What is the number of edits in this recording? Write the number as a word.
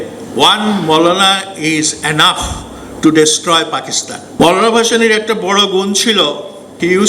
one